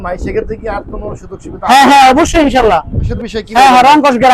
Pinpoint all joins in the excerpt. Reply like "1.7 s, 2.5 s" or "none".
3.0 s